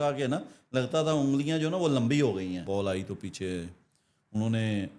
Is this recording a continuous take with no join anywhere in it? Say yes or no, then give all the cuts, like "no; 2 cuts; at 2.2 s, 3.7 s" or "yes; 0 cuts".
no; 1 cut; at 2.6 s